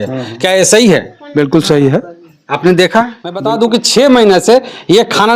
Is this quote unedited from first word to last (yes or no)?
no